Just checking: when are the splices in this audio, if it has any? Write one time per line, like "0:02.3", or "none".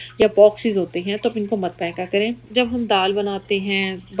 0:02.4

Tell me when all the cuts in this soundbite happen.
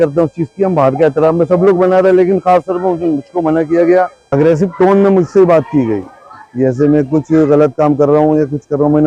0:04.3

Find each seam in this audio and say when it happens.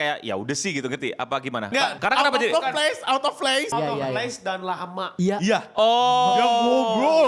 0:02.0
0:03.7

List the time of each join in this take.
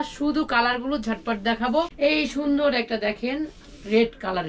0:01.9

